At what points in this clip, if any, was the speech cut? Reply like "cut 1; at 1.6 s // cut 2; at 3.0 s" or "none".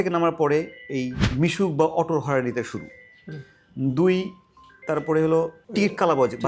cut 1; at 1.2 s